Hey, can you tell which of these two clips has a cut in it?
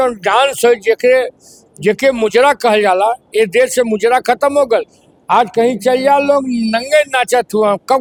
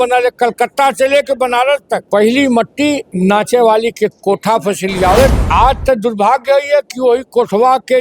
second; 3 cuts; at 2.0 s, 3.1 s, 5.4 s

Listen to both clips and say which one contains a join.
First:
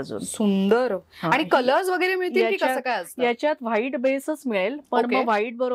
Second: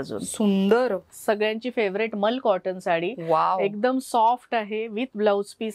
second; 1 cut; at 1.1 s

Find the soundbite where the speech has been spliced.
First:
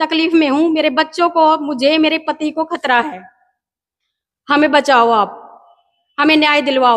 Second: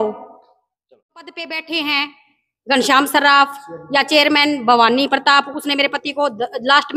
second; 1 cut; at 1.4 s

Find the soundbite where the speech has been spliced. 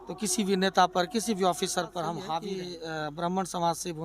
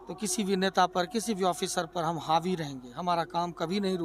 first; 1 cut; at 2.4 s

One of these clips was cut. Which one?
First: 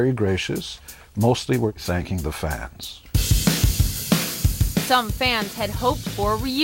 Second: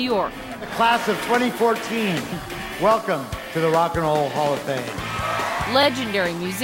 second; 1 cut; at 4.6 s

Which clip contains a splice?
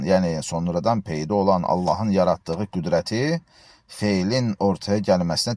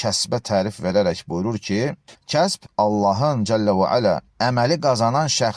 second; 1 cut; at 2.1 s

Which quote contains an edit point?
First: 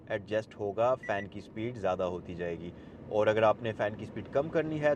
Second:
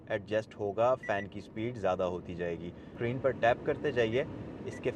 second; 1 cut; at 2.9 s

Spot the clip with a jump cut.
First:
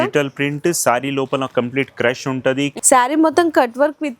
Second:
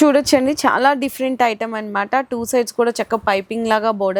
first; 1 cut; at 2.8 s

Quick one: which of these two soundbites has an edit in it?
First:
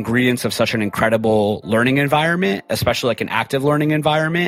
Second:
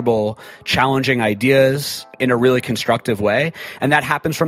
second; 1 cut; at 2.1 s

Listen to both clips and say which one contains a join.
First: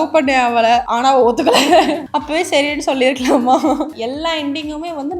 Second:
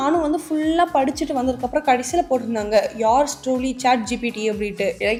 first; 3 cuts; at 0.9 s, 2.1 s, 3.9 s

